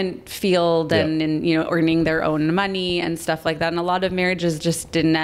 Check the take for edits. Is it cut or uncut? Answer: uncut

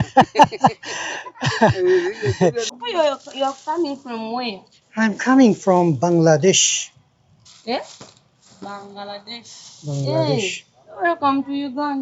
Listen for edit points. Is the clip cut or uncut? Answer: cut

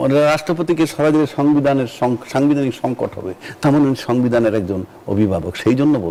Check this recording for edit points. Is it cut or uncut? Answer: uncut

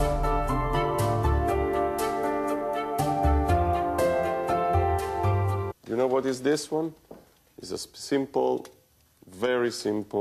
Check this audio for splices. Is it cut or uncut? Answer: uncut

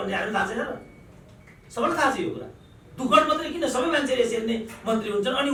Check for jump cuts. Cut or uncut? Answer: uncut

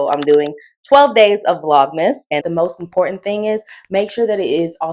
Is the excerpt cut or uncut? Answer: cut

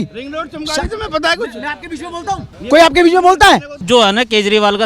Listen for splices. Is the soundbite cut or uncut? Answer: cut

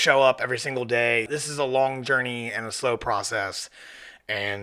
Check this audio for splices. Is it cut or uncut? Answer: cut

